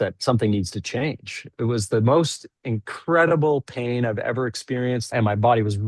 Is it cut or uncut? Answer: cut